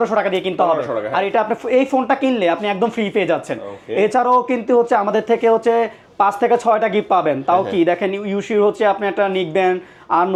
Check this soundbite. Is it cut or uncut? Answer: uncut